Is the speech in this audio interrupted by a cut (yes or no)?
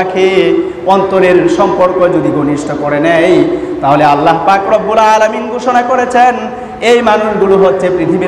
no